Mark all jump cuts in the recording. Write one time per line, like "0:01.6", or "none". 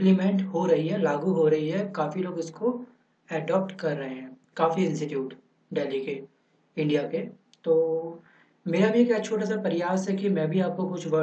0:06.4